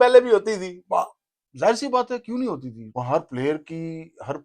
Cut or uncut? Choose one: cut